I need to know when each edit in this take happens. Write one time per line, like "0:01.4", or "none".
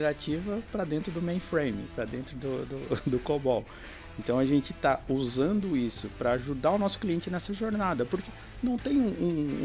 none

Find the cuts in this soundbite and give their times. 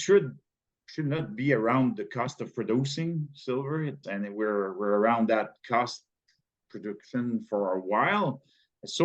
0:04.0

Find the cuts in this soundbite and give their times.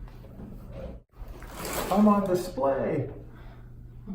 0:01.1

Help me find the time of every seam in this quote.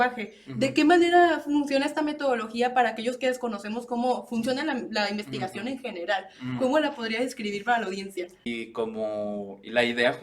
0:08.5

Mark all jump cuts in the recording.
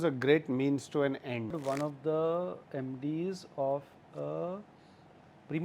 0:01.6

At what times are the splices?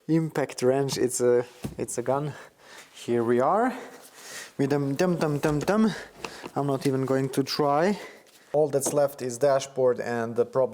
0:08.5

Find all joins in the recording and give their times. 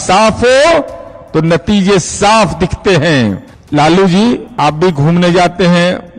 0:03.5
0:04.5

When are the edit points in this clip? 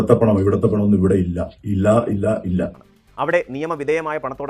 0:02.8

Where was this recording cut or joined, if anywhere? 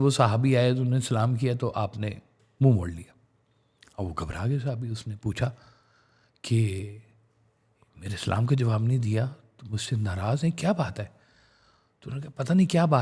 none

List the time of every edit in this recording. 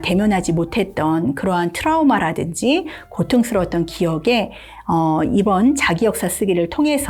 none

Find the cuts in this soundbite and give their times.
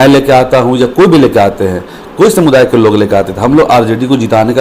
none

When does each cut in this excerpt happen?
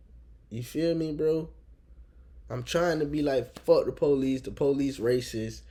none

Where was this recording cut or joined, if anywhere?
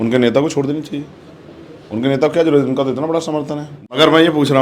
0:03.7

